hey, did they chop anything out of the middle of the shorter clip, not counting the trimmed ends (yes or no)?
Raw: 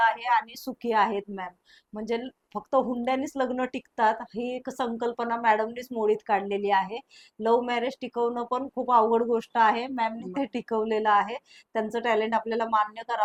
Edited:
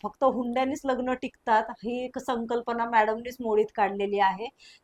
no